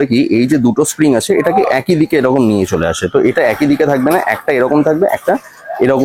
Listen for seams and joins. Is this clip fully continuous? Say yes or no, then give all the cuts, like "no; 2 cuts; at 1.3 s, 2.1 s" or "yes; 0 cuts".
yes; 0 cuts